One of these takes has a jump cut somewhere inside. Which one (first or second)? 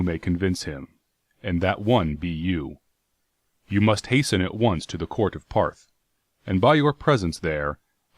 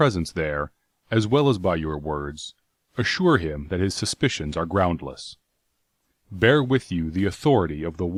first